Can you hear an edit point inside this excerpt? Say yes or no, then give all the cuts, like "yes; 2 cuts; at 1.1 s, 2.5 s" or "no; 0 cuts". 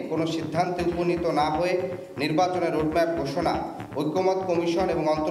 no; 0 cuts